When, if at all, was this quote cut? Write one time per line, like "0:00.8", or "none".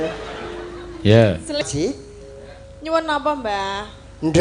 0:01.6